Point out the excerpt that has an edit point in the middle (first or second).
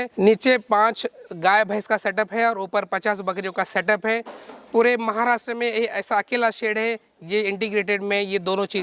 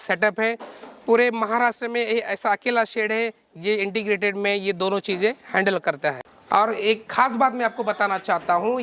second